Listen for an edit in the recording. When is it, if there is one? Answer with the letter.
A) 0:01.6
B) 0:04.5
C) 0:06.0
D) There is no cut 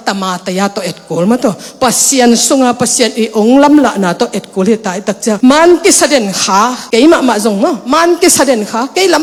D